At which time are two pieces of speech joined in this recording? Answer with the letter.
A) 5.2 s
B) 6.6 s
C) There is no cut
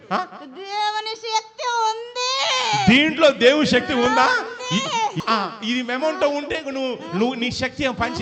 A